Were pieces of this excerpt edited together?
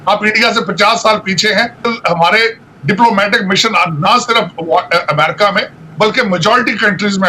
yes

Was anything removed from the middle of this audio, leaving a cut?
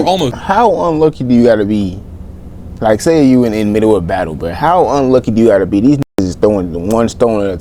no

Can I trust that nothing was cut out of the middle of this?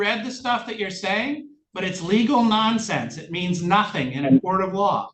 yes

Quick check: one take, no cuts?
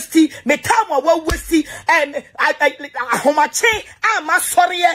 yes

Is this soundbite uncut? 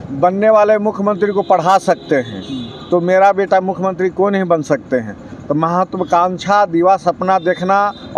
yes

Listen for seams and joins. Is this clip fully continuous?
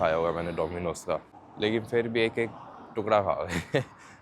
no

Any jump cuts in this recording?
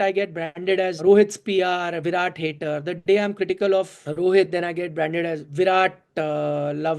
yes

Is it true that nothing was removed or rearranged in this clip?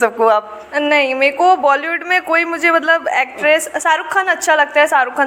yes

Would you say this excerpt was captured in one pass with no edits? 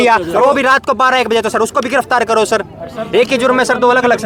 yes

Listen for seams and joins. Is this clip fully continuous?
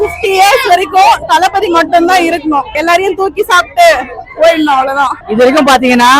yes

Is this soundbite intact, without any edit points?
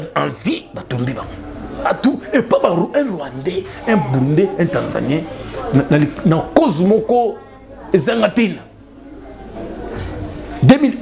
no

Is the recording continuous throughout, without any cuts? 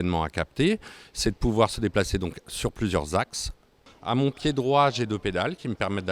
no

